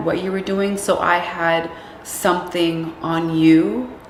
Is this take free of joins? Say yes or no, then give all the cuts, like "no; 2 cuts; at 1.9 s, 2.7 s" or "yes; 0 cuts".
yes; 0 cuts